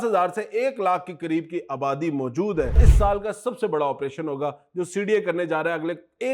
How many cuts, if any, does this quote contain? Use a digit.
1